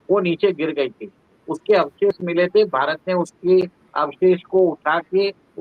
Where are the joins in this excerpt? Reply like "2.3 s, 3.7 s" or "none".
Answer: none